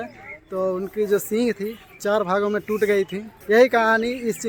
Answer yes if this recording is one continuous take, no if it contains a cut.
yes